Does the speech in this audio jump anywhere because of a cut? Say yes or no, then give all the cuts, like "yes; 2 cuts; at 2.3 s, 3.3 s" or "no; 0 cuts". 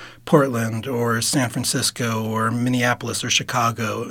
no; 0 cuts